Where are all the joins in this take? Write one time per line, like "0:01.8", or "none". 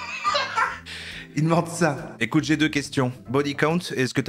0:02.2